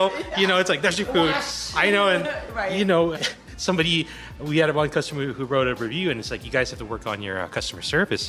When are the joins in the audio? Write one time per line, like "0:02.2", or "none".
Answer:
0:03.2